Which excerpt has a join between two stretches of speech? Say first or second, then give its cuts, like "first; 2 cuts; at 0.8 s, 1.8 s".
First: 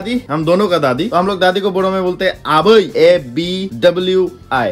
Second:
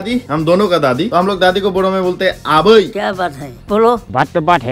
second; 1 cut; at 2.9 s